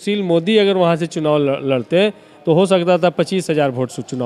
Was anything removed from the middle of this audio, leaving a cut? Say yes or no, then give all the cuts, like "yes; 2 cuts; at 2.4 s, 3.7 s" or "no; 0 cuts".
no; 0 cuts